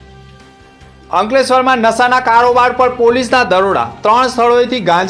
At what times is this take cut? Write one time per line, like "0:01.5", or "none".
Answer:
0:01.0